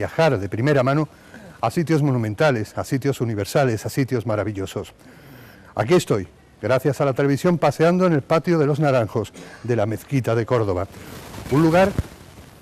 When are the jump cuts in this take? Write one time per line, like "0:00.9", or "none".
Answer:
none